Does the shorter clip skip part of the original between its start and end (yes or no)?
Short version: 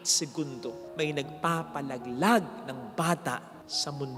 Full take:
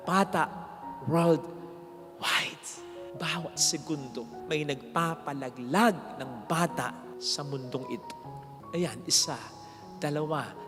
no